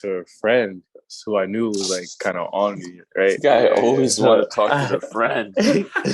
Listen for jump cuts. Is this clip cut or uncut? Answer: uncut